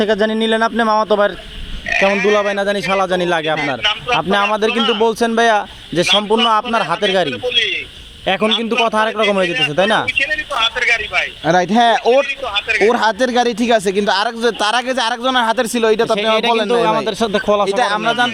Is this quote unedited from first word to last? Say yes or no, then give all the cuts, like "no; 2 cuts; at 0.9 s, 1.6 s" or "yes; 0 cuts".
yes; 0 cuts